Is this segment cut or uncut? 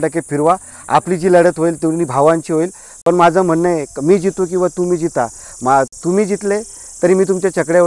uncut